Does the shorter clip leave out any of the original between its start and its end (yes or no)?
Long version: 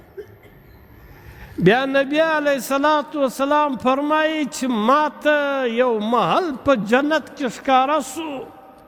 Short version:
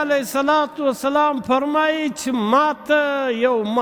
no